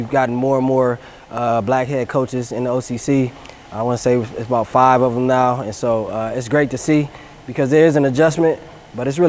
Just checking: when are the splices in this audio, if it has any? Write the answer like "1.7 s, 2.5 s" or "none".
none